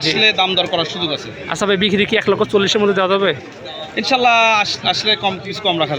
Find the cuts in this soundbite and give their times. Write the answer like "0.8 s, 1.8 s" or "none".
none